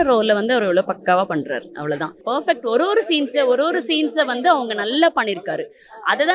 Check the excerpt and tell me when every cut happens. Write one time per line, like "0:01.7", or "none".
0:02.2